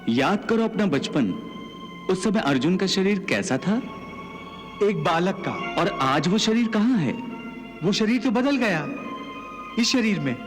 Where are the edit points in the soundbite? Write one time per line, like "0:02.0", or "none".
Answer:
0:05.6